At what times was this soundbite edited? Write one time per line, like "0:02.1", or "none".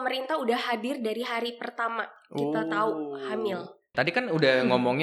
0:03.9